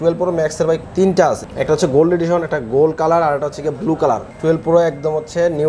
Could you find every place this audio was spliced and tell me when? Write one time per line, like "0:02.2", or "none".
0:01.5
0:04.3